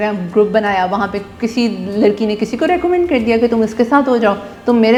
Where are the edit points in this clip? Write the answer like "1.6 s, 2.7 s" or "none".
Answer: none